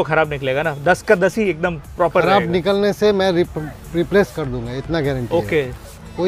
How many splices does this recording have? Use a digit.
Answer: 0